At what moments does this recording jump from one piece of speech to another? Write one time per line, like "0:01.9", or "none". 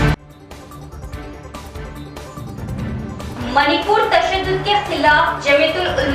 0:02.4